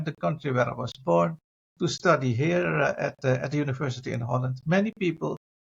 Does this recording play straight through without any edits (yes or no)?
yes